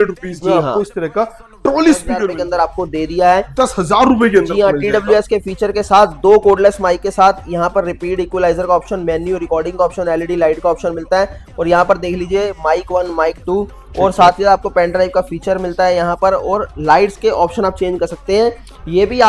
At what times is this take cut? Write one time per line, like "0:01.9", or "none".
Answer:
0:02.3